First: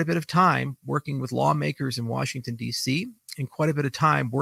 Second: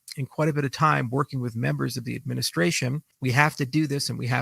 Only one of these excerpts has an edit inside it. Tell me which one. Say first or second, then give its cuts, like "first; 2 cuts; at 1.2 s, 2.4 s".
second; 1 cut; at 3.1 s